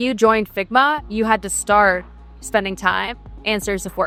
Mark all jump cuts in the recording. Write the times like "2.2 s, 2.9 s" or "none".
none